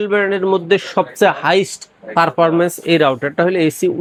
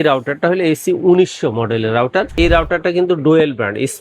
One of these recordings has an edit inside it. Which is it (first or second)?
second